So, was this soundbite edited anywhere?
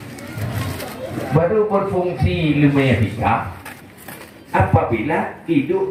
no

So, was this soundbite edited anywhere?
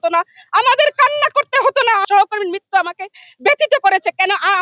yes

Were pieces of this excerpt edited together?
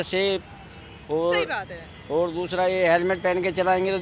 no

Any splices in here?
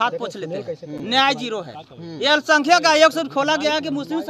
no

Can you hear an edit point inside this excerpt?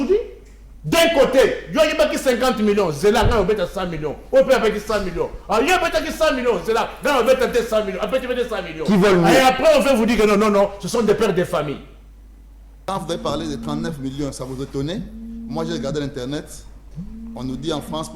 yes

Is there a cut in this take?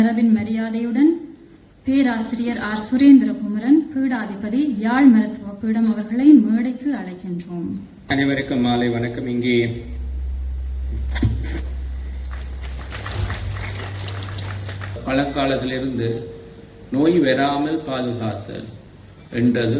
no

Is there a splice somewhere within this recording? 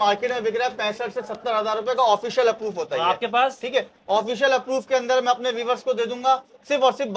no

